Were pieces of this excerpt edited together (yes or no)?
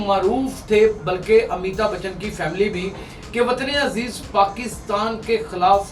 no